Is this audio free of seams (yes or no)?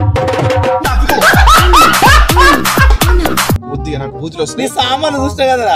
no